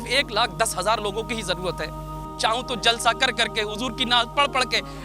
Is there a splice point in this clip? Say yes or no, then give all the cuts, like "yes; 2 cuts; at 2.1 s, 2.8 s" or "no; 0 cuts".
yes; 1 cut; at 2.3 s